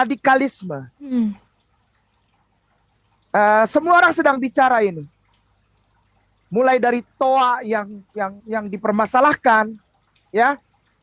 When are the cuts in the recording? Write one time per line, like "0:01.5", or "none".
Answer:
none